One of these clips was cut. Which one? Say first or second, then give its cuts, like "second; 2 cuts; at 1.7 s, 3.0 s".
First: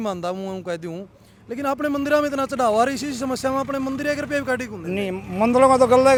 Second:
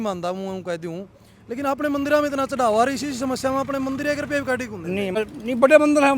second; 1 cut; at 5.2 s